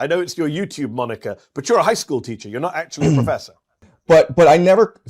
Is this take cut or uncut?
cut